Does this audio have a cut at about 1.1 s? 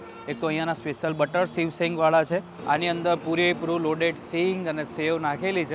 no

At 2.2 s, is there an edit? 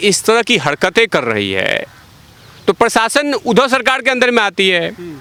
no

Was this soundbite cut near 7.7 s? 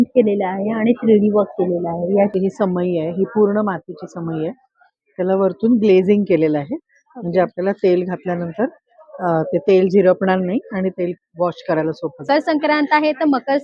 no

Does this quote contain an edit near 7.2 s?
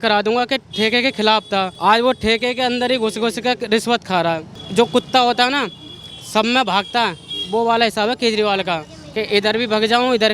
no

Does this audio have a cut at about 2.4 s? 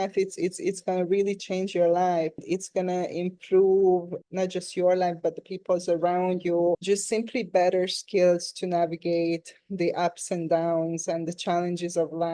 yes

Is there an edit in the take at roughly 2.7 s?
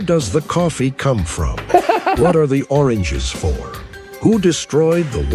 no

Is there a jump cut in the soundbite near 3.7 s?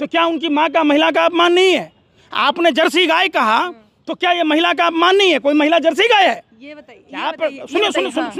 no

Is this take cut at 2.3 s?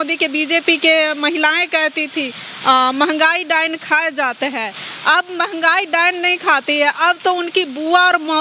no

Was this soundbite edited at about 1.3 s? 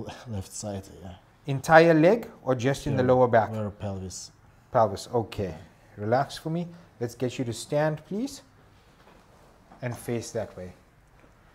no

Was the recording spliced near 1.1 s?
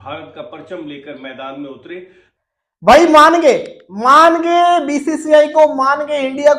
no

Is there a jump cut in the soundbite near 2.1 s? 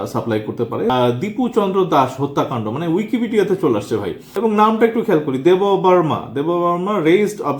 no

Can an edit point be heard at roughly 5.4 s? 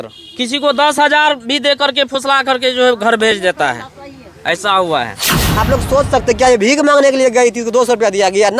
yes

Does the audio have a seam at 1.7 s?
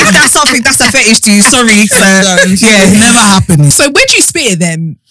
no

